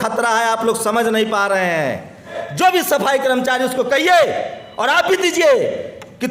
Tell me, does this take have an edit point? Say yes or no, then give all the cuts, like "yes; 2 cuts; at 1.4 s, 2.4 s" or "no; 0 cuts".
yes; 1 cut; at 2.4 s